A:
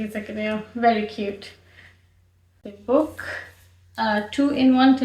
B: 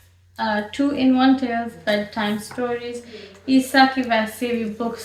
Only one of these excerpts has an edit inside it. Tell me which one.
A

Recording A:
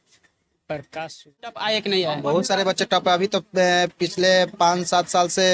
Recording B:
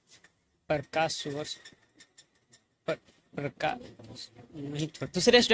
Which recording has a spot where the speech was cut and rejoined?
A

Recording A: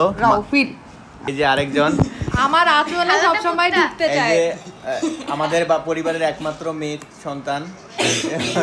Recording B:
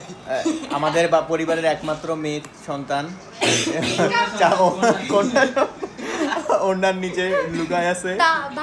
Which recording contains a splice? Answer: A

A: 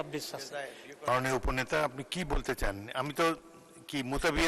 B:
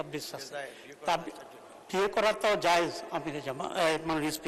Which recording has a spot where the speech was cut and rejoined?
A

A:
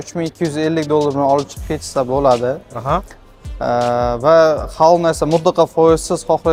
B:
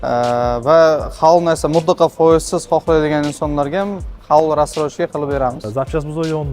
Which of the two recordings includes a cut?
B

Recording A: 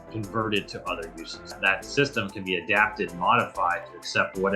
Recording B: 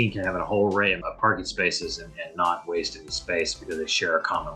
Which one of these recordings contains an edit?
A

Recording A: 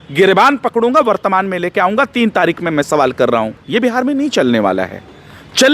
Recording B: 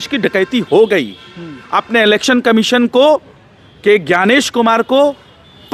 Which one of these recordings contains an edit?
A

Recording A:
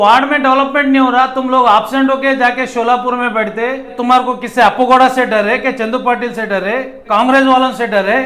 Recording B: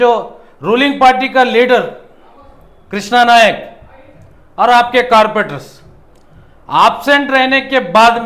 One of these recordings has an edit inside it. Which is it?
A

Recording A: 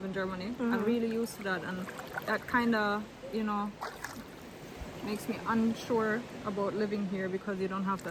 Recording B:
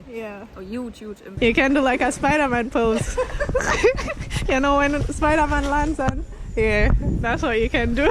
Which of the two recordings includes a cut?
B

